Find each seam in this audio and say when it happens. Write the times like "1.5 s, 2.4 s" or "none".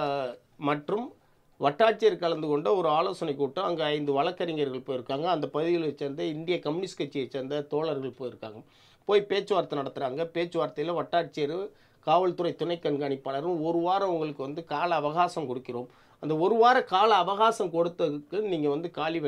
none

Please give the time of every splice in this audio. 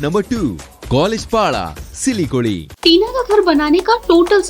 2.7 s

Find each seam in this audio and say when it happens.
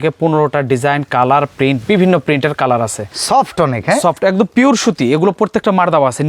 3.0 s

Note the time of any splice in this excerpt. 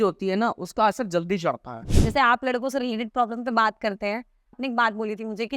1.8 s, 4.6 s

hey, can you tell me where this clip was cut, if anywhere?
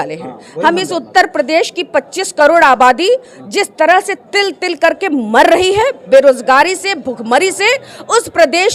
none

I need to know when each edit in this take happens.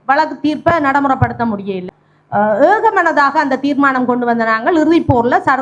1.8 s

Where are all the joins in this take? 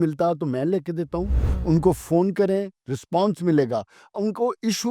1.4 s

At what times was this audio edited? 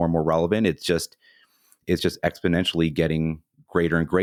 none

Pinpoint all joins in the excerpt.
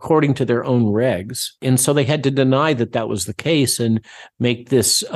1.6 s

